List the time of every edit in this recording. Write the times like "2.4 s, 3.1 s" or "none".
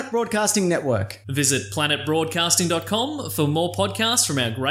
none